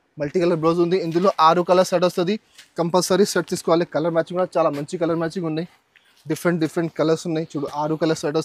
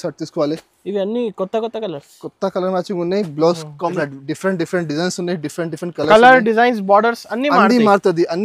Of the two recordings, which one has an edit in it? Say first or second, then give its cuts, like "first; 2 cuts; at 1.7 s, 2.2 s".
second; 1 cut; at 3.9 s